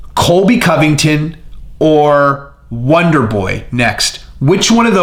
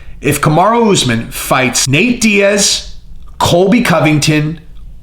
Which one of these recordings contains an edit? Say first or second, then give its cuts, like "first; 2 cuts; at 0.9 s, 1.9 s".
second; 1 cut; at 1.8 s